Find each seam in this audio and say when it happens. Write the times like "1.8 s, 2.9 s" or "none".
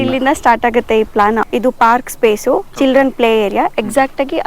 1.4 s